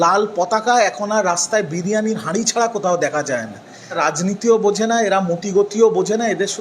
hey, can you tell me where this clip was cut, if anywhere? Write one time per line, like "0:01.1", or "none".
0:04.0